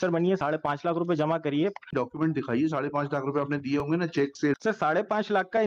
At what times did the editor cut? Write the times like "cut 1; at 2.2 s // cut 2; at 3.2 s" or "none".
cut 1; at 1.9 s // cut 2; at 4.6 s